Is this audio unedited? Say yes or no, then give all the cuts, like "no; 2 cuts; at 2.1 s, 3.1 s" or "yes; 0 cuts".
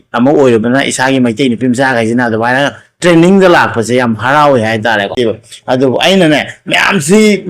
no; 1 cut; at 5.1 s